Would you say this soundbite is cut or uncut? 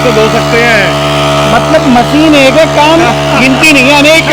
uncut